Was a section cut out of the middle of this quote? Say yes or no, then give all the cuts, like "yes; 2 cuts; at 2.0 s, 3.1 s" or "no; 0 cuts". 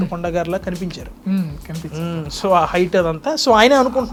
no; 0 cuts